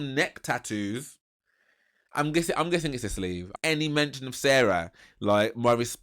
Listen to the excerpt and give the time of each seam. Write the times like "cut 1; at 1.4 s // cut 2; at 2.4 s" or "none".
cut 1; at 3.5 s